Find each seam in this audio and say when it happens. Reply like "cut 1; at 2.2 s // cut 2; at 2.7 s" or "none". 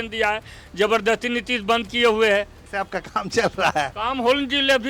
cut 1; at 2.6 s